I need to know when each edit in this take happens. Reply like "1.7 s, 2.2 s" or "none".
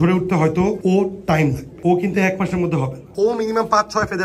0.8 s, 1.7 s, 3.0 s